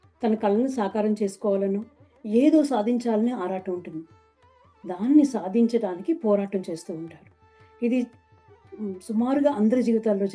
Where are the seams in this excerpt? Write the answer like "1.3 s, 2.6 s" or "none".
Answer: none